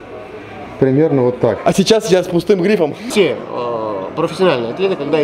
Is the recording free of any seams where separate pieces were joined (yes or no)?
no